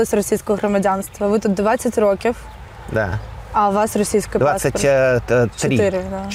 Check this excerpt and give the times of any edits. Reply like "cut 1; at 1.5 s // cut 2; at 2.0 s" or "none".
none